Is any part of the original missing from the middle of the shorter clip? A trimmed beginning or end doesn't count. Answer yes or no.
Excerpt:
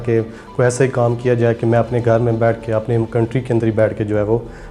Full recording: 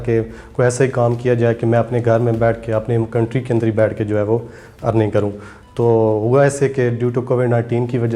no